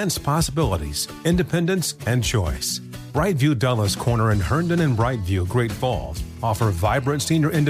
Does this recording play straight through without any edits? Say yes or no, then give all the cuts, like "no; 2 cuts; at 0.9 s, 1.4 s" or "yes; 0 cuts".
yes; 0 cuts